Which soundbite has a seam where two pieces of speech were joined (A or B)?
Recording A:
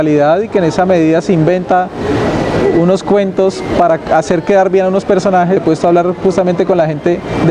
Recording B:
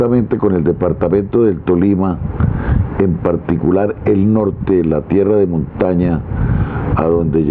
A